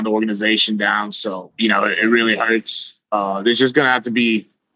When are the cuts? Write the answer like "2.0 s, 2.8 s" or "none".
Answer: 1.5 s